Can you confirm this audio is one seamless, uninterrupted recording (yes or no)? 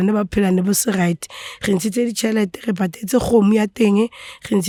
yes